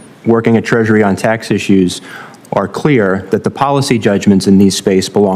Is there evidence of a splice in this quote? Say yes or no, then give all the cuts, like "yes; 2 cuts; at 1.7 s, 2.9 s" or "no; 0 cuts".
no; 0 cuts